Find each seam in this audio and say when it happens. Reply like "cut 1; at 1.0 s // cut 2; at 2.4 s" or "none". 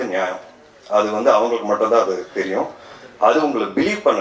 none